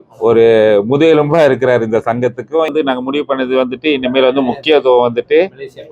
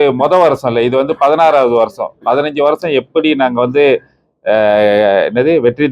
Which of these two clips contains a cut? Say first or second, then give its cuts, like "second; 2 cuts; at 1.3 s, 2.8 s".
first; 1 cut; at 2.7 s